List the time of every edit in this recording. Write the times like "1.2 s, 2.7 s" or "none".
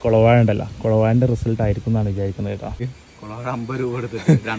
3.0 s